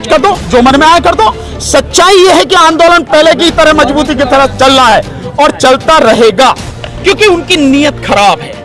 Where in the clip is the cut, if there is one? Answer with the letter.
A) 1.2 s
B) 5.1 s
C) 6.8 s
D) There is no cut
C